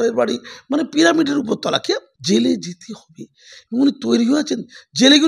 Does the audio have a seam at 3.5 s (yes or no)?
no